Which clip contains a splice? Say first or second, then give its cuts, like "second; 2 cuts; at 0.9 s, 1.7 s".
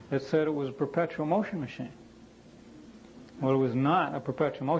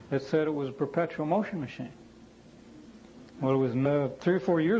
first; 1 cut; at 3.8 s